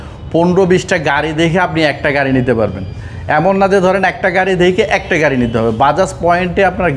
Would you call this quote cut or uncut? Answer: uncut